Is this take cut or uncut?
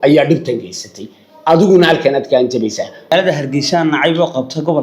cut